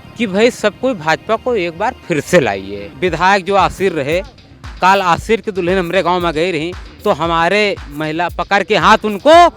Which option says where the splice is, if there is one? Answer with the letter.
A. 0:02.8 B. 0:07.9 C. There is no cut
A